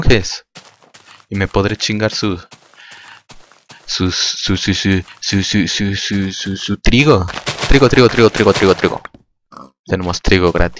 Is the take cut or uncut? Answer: uncut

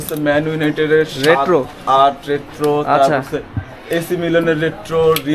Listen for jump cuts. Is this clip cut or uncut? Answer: uncut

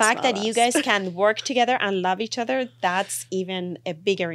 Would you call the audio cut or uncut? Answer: uncut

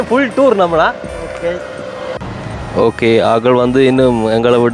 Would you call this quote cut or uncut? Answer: cut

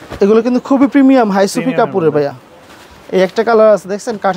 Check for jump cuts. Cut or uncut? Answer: uncut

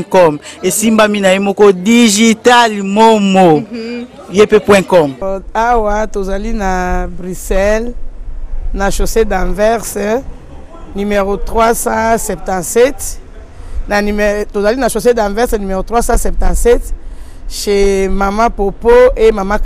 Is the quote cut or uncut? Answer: cut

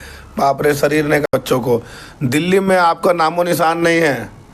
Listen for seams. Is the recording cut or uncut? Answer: cut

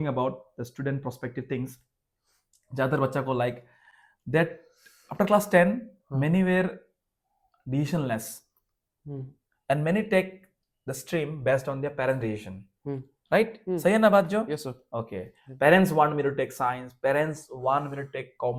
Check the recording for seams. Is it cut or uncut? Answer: uncut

